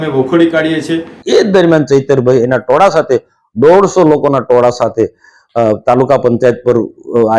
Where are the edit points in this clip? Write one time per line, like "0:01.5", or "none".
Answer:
0:01.2